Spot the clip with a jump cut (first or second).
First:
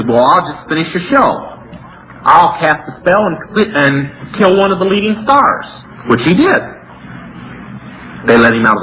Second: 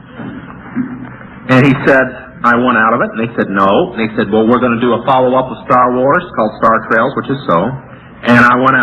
second